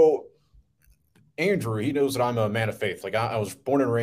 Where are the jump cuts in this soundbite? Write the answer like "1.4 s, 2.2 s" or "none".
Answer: none